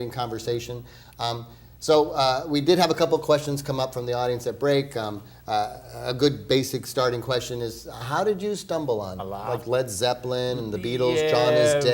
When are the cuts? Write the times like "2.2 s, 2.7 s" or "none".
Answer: none